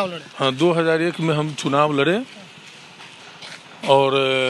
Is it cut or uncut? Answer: uncut